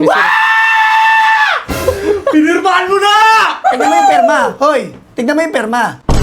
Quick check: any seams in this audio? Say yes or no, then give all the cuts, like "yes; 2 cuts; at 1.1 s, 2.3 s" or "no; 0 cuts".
yes; 1 cut; at 3.6 s